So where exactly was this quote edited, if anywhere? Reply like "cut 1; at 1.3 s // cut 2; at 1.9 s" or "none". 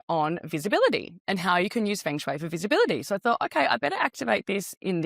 none